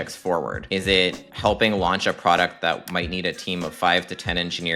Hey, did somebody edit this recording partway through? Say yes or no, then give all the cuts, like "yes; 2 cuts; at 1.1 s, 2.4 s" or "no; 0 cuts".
yes; 1 cut; at 1.1 s